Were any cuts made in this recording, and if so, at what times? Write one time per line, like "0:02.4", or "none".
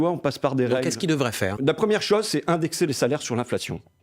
0:01.6